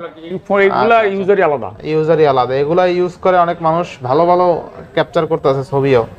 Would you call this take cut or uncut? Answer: uncut